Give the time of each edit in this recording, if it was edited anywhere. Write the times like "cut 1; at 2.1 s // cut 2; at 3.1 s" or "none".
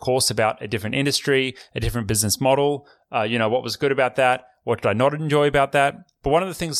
none